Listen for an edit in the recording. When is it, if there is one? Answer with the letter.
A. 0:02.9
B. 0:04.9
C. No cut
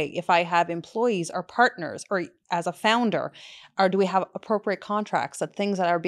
C